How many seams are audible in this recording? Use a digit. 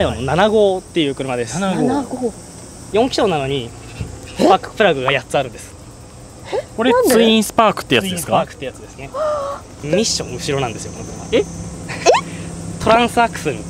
2